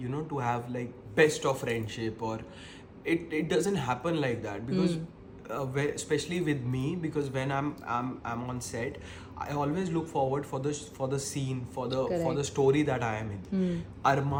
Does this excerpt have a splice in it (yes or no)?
no